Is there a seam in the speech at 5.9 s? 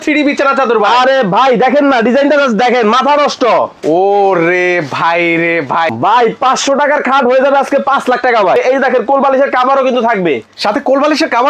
yes; 2 cuts; at 5.9 s, 8.6 s

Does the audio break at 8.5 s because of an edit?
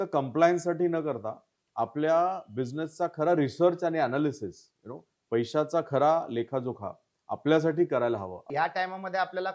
yes; 1 cut; at 8.5 s

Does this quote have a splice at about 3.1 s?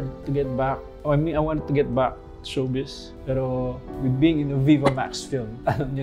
yes; 1 cut; at 3.1 s

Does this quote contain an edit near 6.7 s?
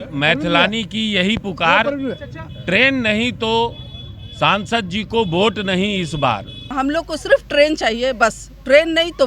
yes; 1 cut; at 6.7 s

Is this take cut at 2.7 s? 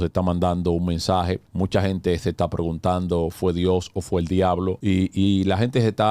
no; 2 cuts; at 1.5 s, 4.8 s

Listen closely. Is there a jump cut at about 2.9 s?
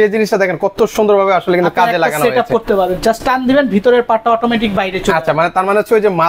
no; 0 cuts

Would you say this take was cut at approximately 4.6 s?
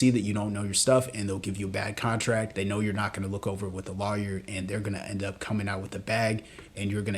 no; 1 cut; at 2.5 s

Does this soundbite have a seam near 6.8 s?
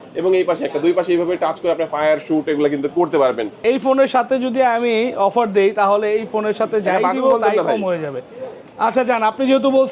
no; 1 cut; at 3.6 s

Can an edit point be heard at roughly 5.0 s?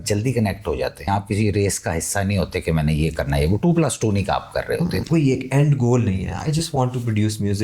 yes; 2 cuts; at 1.1 s, 5.0 s

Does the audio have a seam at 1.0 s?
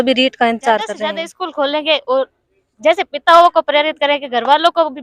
yes; 1 cut; at 1.0 s

